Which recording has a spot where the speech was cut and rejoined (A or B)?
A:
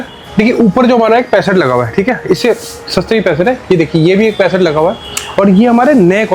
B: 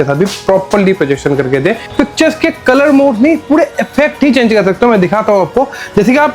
B